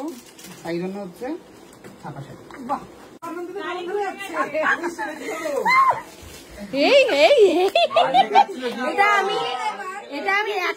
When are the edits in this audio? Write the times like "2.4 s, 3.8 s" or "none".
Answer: 3.2 s